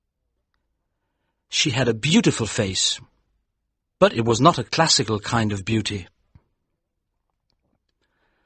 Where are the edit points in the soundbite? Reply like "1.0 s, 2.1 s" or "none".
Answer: none